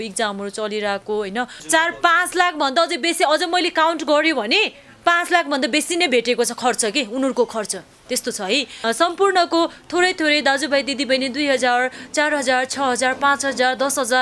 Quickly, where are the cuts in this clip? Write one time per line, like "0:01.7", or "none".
0:01.6
0:08.7